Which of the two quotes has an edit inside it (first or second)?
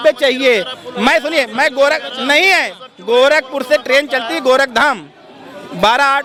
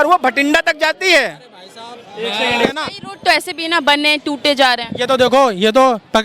second